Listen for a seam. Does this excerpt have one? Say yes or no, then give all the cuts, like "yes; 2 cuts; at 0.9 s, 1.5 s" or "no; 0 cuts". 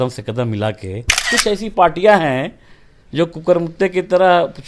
yes; 1 cut; at 1.3 s